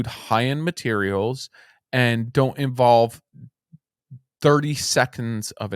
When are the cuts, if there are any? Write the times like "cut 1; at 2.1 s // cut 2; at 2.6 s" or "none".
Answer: cut 1; at 2.3 s